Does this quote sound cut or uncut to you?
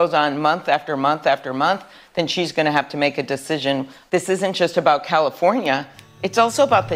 cut